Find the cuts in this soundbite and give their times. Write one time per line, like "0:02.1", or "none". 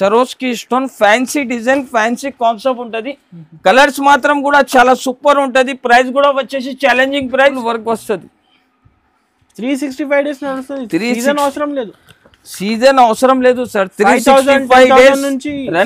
0:07.6